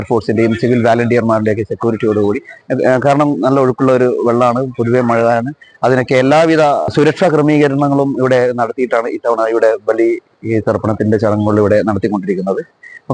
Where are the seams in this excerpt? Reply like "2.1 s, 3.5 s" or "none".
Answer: 6.9 s